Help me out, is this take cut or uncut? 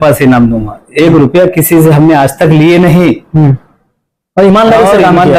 uncut